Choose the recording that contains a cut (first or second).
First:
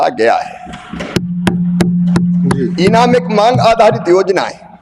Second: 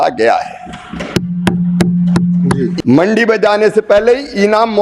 second